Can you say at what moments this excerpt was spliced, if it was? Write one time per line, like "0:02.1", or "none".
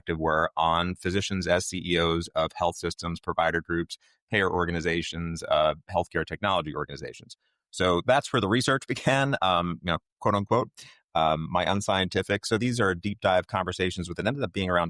none